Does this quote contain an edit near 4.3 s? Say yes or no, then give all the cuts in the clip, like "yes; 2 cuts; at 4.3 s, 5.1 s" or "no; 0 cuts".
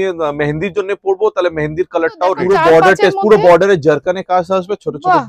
no; 1 cut; at 2.4 s